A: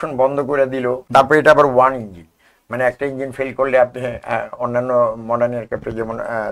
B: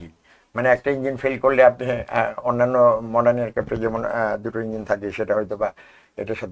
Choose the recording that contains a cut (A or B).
A